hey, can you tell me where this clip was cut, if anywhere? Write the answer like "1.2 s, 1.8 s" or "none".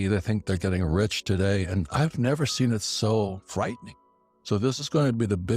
3.8 s